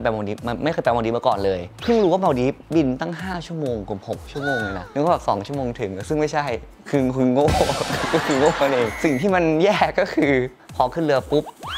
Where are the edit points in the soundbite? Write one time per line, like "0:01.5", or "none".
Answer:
0:04.8
0:08.9
0:10.6

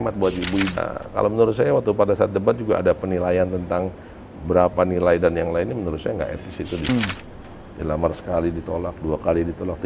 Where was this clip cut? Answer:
0:00.8
0:06.9

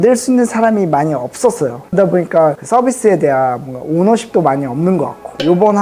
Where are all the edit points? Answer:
0:01.9

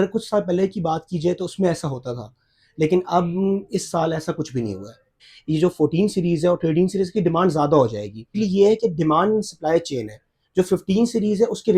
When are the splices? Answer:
0:05.3
0:08.4

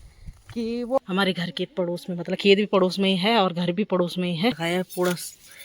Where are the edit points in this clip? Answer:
0:01.0
0:04.6

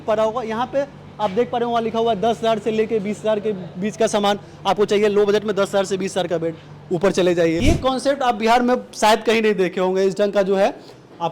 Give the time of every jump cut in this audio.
0:07.6

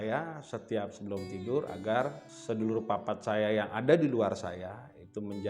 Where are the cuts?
0:02.3

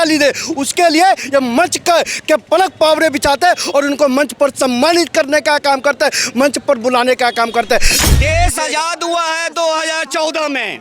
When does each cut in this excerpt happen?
0:08.0

